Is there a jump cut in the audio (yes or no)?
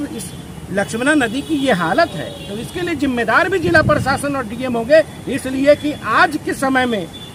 no